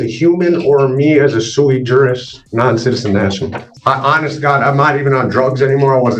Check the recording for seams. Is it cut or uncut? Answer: cut